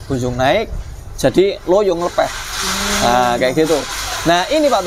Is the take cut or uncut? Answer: uncut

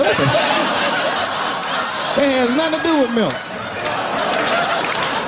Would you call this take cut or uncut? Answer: uncut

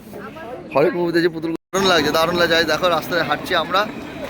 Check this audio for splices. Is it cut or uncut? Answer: cut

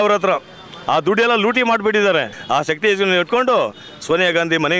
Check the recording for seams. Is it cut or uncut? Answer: cut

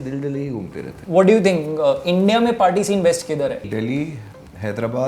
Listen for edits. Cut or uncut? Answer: cut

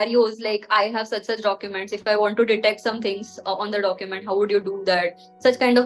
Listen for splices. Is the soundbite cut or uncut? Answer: uncut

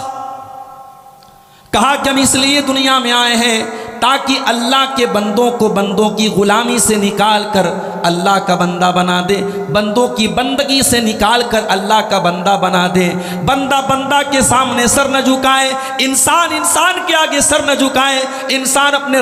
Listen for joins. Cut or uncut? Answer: uncut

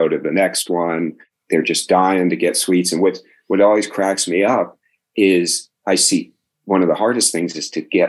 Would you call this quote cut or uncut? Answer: uncut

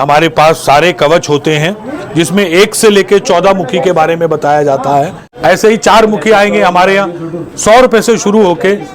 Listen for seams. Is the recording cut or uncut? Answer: cut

